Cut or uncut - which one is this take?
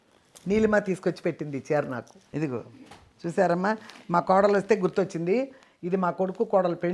cut